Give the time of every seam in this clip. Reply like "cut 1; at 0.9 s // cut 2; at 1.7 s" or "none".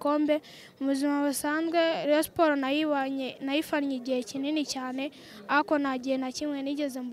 none